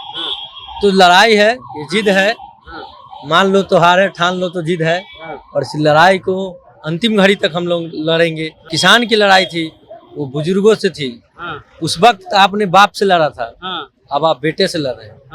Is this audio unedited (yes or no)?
no